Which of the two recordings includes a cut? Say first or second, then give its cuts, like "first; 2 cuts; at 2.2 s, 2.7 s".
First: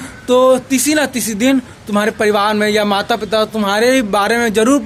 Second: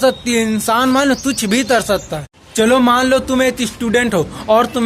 second; 1 cut; at 2.4 s